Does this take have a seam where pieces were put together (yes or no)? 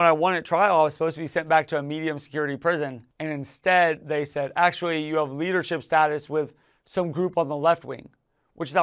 yes